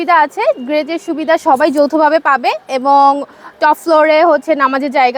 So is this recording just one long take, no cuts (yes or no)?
yes